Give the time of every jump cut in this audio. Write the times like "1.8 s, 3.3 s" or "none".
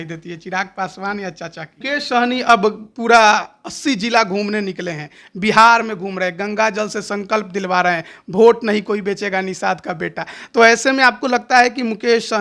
1.8 s